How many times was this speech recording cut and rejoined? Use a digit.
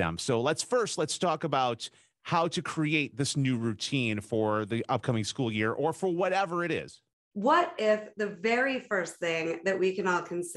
1